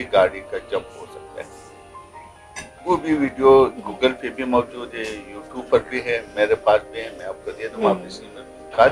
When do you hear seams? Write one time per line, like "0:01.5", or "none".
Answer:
none